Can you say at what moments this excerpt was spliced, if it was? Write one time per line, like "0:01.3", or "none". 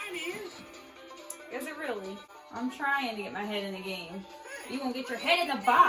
0:02.3